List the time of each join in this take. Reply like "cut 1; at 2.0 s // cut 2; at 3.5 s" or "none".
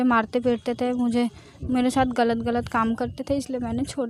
none